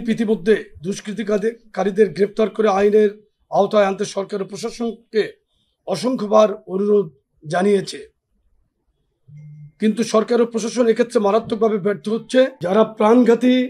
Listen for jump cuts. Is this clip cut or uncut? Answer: cut